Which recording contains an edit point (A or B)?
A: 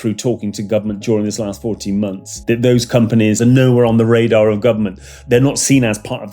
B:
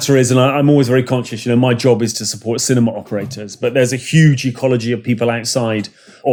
A